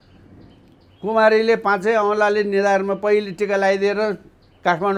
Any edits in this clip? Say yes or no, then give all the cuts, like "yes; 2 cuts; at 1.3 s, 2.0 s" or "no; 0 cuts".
no; 0 cuts